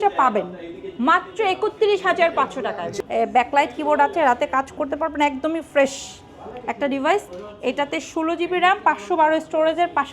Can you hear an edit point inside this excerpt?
yes; 1 cut; at 2.9 s

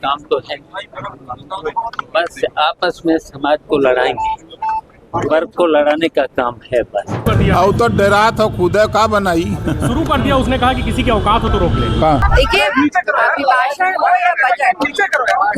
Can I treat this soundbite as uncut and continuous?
no; 2 cuts; at 7.2 s, 12.3 s

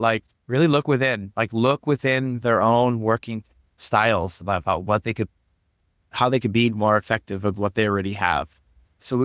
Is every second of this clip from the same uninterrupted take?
yes; 0 cuts

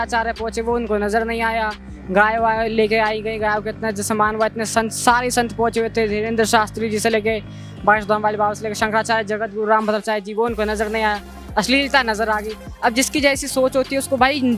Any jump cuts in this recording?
no; 0 cuts

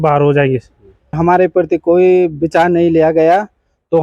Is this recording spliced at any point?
yes; 1 cut; at 1.2 s

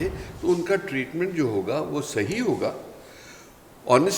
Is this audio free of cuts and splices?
yes; 0 cuts

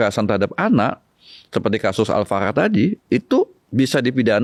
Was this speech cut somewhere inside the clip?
no; 0 cuts

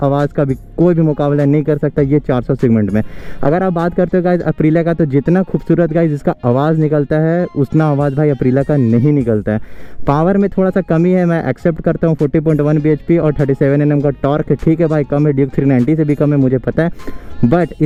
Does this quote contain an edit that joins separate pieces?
no; 0 cuts

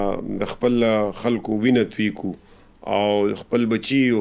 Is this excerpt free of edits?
yes; 0 cuts

